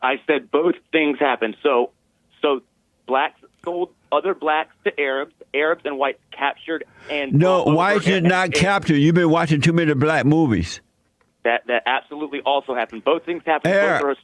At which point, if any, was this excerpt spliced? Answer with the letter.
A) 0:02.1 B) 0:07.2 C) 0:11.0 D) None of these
D